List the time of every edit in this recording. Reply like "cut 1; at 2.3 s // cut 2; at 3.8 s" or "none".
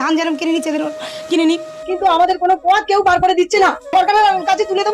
cut 1; at 1.7 s // cut 2; at 3.9 s